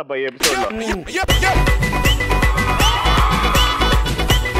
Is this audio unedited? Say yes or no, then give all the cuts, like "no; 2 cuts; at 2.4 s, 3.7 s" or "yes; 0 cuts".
yes; 0 cuts